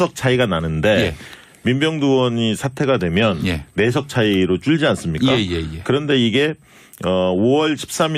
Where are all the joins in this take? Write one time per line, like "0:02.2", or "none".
none